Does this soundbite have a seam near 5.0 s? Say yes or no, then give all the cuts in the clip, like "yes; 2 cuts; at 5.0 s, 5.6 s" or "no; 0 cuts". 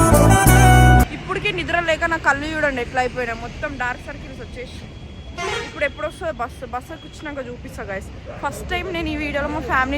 no; 1 cut; at 1.2 s